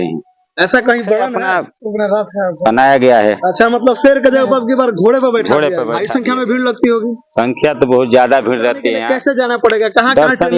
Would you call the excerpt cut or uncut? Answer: cut